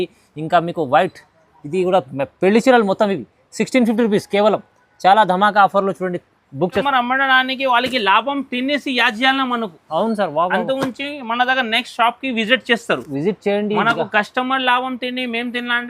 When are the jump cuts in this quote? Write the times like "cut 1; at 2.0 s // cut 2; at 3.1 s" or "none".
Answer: cut 1; at 6.8 s